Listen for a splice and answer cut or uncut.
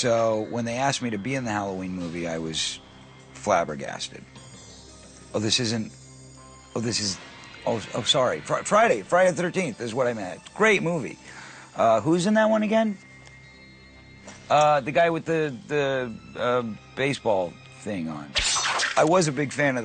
uncut